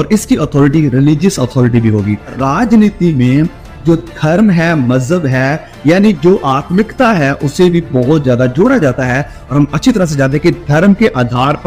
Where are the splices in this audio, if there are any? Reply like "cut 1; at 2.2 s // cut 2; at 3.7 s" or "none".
cut 1; at 2.4 s